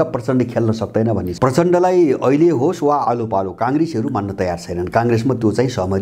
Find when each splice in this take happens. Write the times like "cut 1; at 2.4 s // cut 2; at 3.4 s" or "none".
cut 1; at 1.3 s